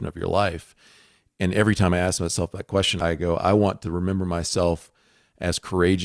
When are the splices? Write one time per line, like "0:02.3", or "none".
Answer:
0:02.9